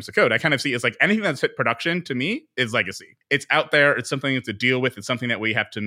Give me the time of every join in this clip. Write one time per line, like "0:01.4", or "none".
0:03.0